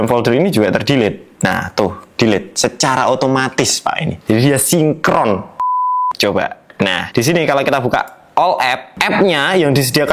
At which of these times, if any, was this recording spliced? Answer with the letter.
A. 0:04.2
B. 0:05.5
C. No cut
B